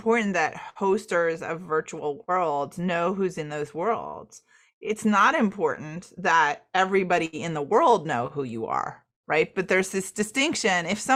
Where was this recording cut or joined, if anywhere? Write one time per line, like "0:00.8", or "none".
none